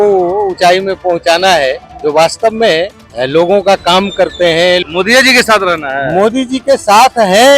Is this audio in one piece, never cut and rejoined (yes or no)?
no